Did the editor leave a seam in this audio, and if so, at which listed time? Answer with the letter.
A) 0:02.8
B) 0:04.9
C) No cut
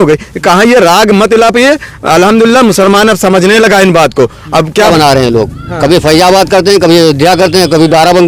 B